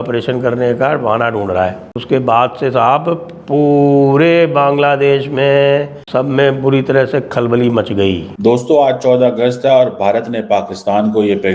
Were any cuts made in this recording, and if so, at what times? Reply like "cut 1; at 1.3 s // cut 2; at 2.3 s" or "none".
cut 1; at 1.9 s // cut 2; at 6.0 s // cut 3; at 8.3 s